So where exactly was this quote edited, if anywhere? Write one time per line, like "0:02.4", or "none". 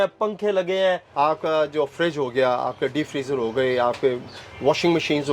0:01.1